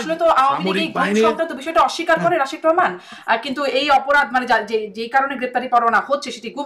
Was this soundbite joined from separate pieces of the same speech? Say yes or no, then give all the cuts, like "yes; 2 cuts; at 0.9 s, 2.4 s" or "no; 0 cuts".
no; 0 cuts